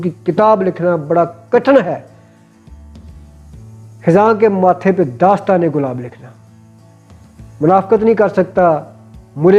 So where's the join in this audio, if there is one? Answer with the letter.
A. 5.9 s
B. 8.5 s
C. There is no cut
C